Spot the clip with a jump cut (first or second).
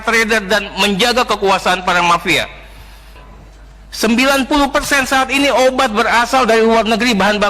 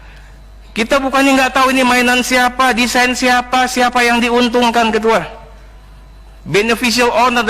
first